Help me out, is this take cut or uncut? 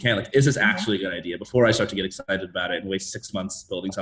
uncut